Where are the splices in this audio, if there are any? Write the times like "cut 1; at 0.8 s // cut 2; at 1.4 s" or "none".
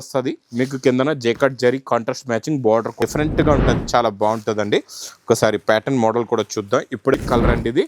cut 1; at 3.0 s // cut 2; at 7.1 s